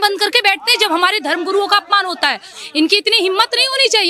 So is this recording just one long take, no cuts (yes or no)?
yes